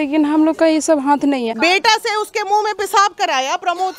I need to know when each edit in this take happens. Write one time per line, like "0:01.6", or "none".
0:01.5